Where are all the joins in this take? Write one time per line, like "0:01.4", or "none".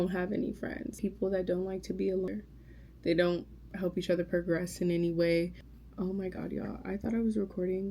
0:00.9
0:02.3
0:05.6